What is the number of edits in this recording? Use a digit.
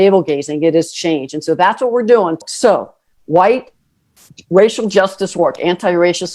1